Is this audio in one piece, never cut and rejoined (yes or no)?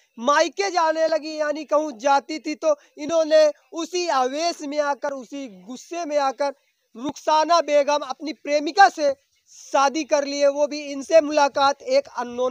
yes